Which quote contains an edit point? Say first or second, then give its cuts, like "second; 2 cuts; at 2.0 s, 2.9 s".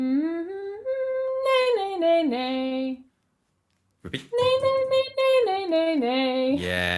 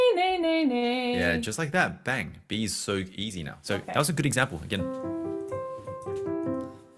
second; 1 cut; at 3.5 s